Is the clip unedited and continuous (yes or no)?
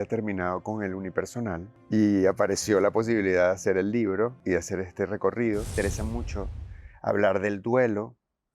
no